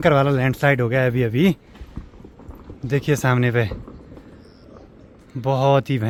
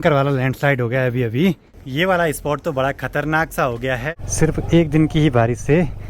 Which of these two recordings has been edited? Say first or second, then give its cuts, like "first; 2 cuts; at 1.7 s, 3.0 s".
second; 2 cuts; at 1.8 s, 4.1 s